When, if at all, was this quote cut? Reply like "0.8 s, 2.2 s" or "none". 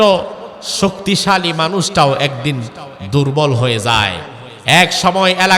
none